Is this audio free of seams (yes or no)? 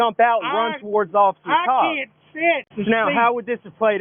no